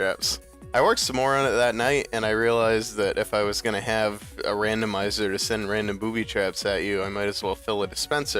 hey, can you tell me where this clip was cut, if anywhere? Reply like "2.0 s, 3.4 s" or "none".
6.6 s